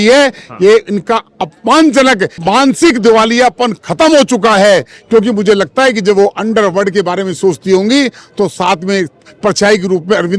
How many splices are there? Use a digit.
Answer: 1